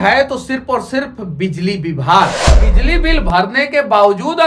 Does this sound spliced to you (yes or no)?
yes